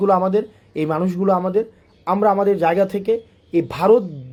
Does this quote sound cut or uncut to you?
uncut